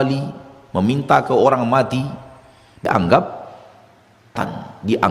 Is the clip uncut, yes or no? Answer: no